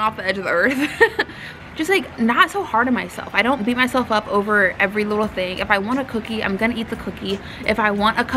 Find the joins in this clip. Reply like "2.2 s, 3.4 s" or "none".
1.5 s